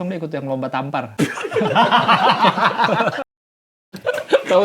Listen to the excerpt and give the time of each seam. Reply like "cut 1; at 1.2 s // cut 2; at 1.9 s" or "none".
cut 1; at 1.1 s